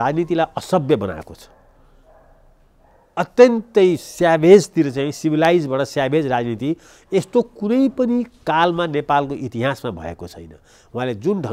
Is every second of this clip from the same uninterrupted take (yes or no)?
yes